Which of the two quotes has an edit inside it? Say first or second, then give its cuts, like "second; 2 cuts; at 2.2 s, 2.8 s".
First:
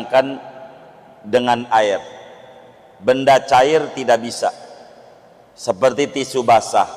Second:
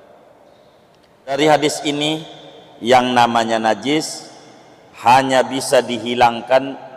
second; 1 cut; at 1.4 s